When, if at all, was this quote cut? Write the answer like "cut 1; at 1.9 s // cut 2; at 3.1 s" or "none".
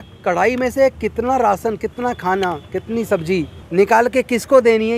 cut 1; at 3.6 s